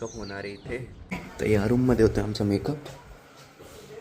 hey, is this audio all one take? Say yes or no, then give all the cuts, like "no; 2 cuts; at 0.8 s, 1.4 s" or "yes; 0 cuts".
no; 1 cut; at 1.0 s